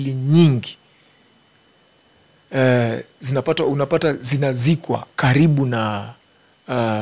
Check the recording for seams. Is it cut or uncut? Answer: uncut